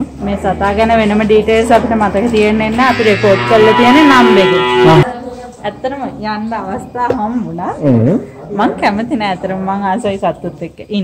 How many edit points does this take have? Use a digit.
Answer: 1